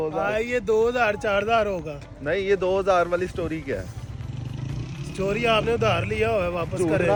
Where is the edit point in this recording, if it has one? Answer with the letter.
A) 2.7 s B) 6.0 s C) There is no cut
C